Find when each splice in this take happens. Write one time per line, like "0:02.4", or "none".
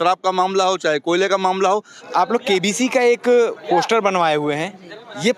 0:01.9